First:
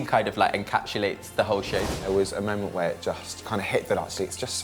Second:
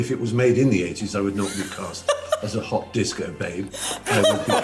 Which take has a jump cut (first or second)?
first